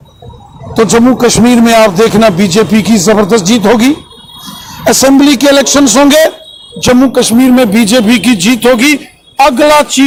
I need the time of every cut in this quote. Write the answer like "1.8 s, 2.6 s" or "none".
none